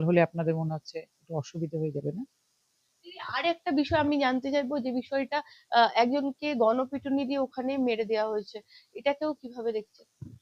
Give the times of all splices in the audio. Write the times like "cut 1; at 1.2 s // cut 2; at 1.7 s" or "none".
none